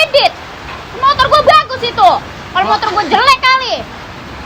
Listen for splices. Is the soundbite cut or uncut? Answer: uncut